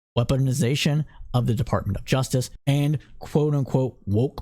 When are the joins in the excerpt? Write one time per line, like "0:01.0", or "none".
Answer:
0:02.6